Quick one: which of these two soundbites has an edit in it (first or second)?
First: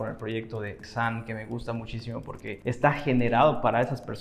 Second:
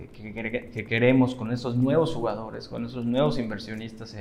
first